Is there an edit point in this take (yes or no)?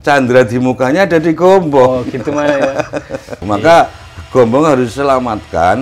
yes